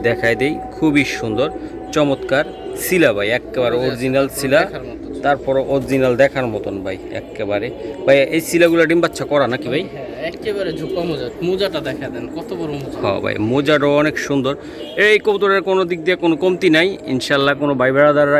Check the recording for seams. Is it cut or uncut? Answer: uncut